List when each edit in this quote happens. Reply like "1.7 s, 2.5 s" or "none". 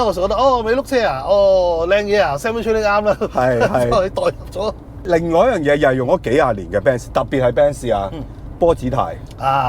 5.0 s